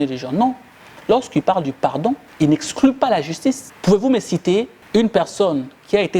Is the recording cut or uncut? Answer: cut